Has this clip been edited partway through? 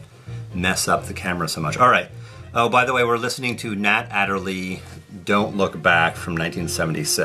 yes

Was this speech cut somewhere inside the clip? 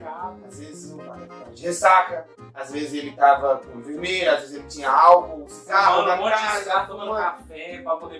no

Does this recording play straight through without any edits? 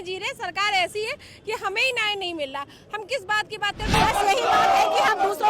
no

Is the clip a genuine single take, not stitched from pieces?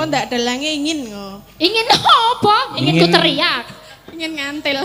yes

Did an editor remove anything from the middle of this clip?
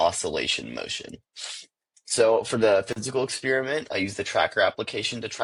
no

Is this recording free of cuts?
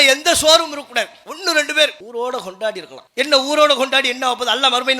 no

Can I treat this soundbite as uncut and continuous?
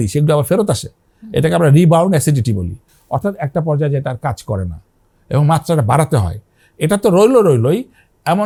yes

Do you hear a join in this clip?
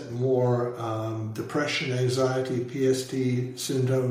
no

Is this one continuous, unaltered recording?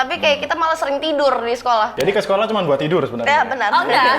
no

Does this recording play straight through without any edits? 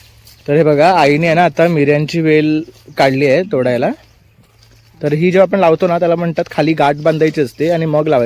yes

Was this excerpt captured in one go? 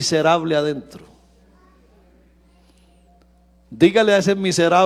yes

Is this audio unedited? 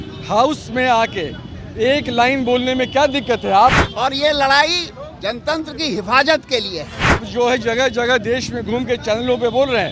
no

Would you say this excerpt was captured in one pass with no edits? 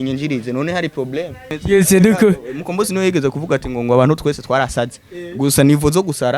no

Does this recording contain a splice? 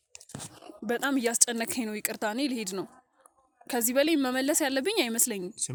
no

